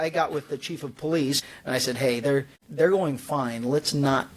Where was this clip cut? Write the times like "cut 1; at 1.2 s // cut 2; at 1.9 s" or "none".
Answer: cut 1; at 1.4 s // cut 2; at 2.6 s